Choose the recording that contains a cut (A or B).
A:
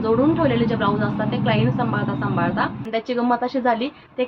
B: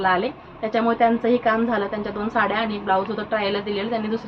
A